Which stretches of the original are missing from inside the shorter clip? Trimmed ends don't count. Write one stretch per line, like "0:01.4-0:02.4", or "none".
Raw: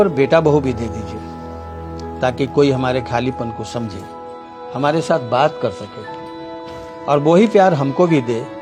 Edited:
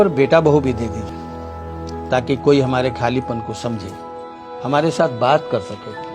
0:01.1-0:01.2